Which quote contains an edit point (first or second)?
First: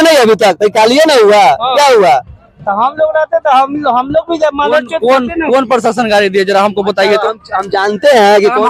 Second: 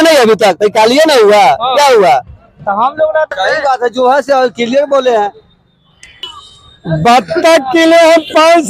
second